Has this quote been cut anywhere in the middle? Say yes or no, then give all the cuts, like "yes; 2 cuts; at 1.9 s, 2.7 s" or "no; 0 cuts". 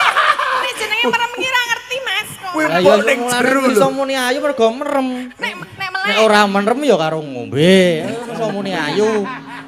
no; 0 cuts